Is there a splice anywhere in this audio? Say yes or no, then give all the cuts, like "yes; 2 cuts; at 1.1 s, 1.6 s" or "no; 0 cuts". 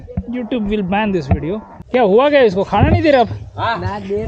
yes; 1 cut; at 1.8 s